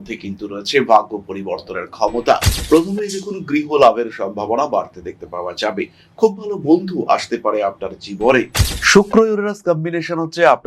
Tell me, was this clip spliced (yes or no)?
yes